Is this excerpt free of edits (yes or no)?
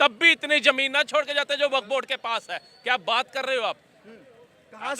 yes